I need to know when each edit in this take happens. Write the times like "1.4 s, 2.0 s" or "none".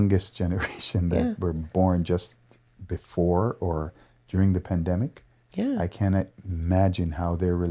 none